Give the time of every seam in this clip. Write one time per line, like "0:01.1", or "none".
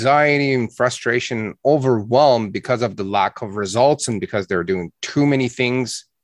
none